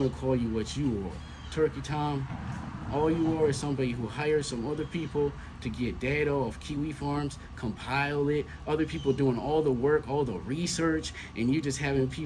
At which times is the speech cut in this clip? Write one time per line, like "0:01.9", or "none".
none